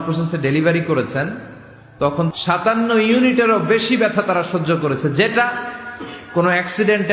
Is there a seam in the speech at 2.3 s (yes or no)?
yes